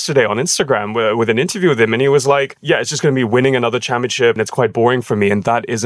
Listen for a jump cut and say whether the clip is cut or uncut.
cut